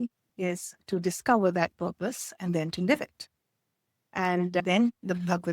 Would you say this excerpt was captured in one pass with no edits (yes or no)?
no